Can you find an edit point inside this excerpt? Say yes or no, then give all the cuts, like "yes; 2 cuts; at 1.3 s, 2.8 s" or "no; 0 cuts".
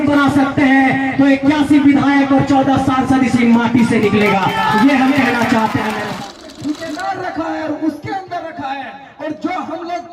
yes; 1 cut; at 6.0 s